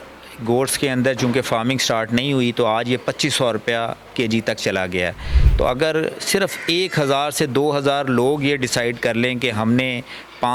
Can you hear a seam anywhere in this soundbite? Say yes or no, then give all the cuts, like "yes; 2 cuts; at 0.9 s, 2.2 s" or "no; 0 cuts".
no; 0 cuts